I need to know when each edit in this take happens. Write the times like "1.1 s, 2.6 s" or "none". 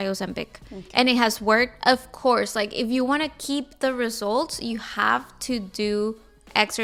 none